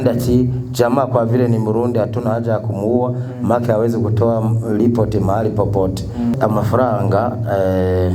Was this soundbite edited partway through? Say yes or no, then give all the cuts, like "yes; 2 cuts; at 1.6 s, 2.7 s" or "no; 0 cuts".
yes; 1 cut; at 6.4 s